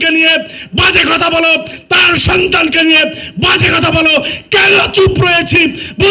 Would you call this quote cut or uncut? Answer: uncut